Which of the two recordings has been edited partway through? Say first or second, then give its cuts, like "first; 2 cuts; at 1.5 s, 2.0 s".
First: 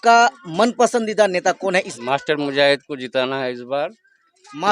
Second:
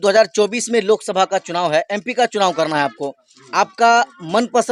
first; 1 cut; at 1.9 s